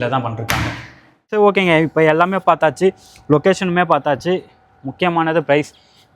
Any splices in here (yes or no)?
yes